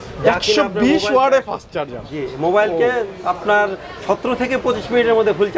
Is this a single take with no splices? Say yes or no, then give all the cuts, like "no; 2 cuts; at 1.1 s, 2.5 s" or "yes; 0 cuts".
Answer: yes; 0 cuts